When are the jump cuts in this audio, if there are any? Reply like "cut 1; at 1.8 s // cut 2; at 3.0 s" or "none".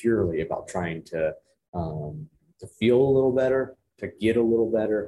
none